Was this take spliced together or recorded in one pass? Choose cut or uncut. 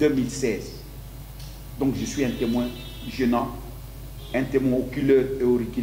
uncut